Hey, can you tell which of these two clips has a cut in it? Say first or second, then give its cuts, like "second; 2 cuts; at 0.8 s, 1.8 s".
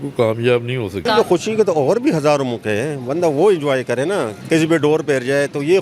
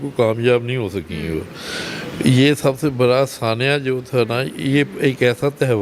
first; 2 cuts; at 1.0 s, 4.3 s